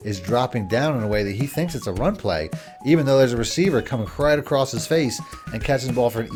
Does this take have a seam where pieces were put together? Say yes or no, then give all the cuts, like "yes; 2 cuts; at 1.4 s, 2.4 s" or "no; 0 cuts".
no; 0 cuts